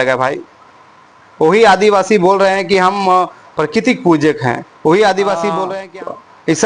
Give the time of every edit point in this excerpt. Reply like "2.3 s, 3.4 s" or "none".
5.8 s